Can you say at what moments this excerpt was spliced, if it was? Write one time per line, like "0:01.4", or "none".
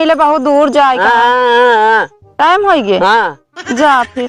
none